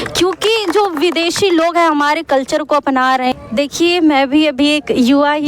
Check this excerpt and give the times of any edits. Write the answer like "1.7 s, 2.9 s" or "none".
3.3 s